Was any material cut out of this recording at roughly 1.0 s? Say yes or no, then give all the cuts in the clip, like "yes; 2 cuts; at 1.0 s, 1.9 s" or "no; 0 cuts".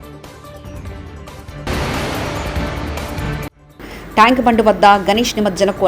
yes; 1 cut; at 1.0 s